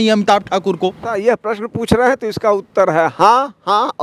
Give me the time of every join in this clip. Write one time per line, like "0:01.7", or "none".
0:01.2